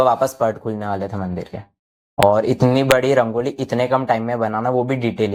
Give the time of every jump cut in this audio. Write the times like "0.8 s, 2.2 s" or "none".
none